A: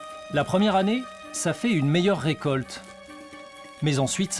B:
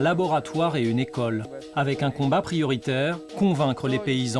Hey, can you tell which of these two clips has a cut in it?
B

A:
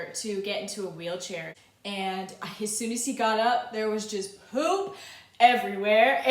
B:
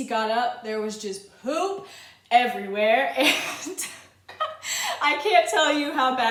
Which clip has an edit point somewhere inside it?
A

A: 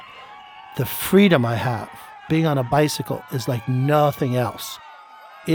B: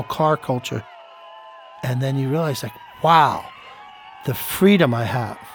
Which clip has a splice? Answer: B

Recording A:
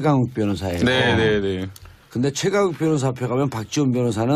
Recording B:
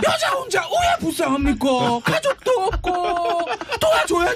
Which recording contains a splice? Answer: B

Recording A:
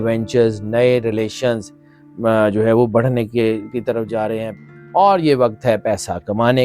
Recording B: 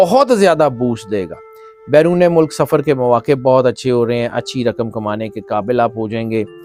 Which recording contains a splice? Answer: A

